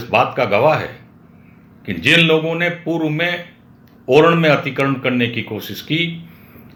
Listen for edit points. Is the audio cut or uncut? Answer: uncut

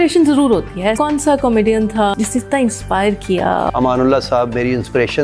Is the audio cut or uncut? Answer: cut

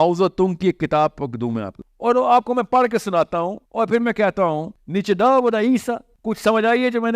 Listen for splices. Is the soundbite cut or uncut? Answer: cut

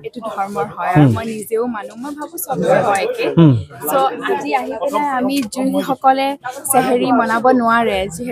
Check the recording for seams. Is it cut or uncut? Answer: uncut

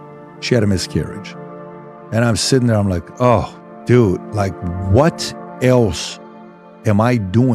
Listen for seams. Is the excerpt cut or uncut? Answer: uncut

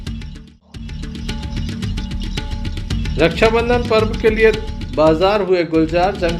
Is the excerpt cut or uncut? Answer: cut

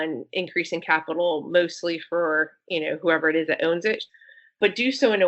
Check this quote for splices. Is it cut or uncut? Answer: cut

